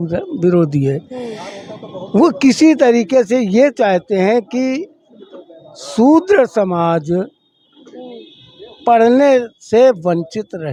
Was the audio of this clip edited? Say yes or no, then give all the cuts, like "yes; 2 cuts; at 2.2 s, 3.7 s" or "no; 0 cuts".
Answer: no; 0 cuts